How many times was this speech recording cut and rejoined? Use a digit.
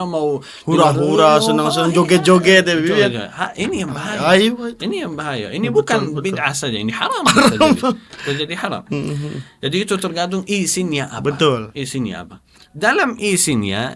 0